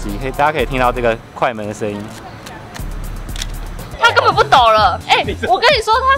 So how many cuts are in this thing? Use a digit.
1